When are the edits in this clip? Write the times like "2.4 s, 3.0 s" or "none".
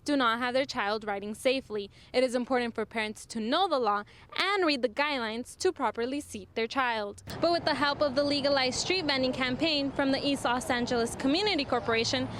7.2 s